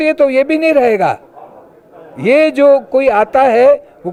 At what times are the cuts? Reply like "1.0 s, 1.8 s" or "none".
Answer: none